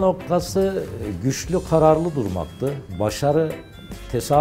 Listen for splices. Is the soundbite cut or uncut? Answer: cut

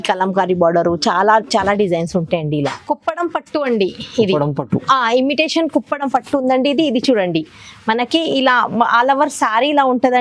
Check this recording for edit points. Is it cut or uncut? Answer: cut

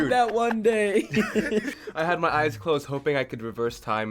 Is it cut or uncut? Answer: cut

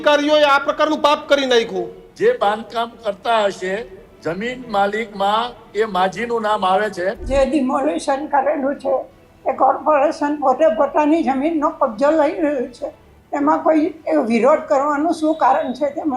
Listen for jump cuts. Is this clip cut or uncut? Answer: cut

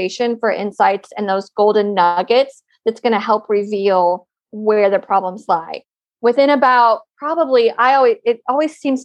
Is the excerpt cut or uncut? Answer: uncut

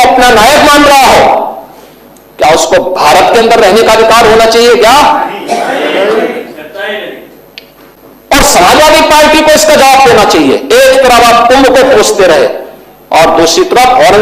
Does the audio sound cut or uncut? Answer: uncut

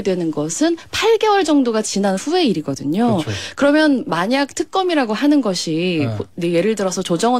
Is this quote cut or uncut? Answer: uncut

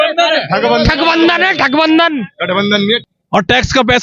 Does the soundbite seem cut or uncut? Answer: cut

